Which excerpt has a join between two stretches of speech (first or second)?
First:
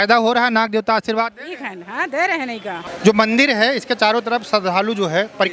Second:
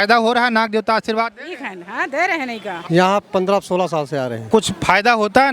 second